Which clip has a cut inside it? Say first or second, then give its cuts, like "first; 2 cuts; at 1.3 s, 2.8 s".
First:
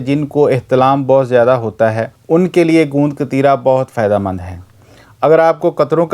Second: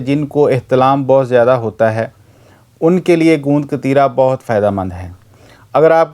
first; 1 cut; at 2.1 s